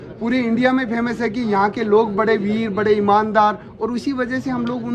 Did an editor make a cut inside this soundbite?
no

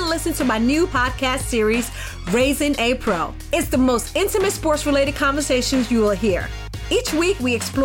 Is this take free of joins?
yes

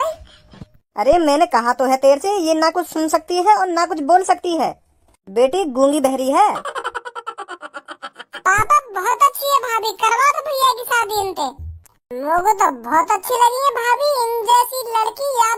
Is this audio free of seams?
yes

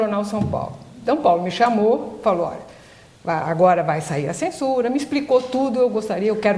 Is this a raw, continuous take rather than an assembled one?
yes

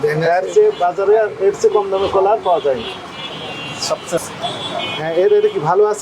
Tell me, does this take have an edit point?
no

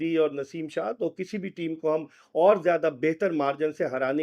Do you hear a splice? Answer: no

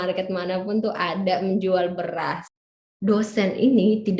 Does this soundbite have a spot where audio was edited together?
yes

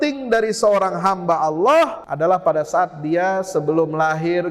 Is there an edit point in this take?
yes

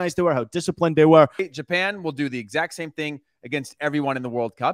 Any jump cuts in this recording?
yes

